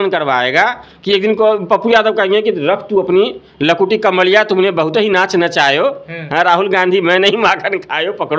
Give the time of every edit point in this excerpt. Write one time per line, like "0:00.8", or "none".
none